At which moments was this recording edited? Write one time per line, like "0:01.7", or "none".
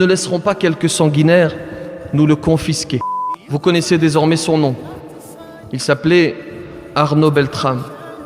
0:03.5